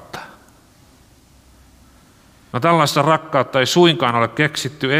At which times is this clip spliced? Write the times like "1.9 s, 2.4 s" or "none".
2.5 s

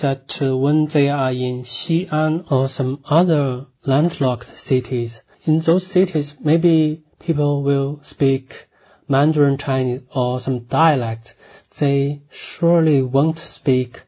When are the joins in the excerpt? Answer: none

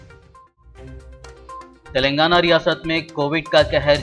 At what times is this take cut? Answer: 1.4 s

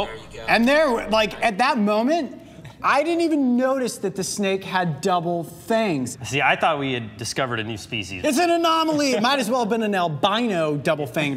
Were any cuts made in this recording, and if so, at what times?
6.1 s, 8.1 s

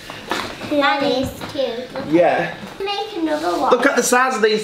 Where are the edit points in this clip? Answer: 2.7 s

